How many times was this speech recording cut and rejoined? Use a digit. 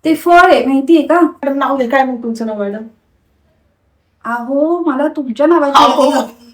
1